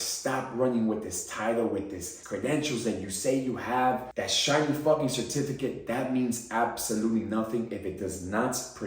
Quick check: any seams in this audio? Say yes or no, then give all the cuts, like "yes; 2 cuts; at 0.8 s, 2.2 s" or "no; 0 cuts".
yes; 2 cuts; at 2.1 s, 4.1 s